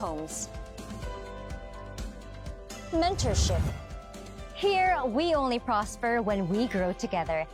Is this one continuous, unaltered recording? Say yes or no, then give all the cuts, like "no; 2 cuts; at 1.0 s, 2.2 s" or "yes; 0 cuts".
yes; 0 cuts